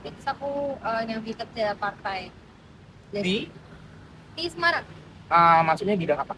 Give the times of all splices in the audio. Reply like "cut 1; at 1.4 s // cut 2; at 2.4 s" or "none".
none